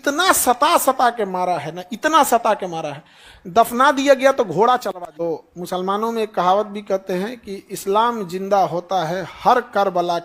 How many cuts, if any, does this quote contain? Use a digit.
1